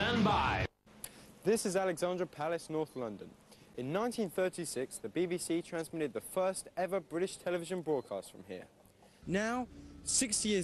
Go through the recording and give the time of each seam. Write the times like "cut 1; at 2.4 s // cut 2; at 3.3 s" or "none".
cut 1; at 3.9 s